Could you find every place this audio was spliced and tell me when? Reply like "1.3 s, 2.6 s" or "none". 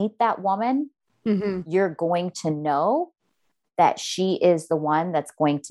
none